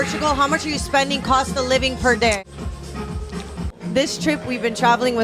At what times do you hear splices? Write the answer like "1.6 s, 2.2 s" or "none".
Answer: 2.4 s, 3.6 s